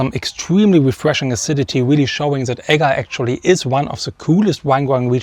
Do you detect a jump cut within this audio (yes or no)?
no